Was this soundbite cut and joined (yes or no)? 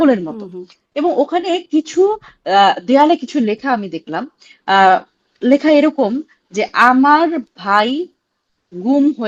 no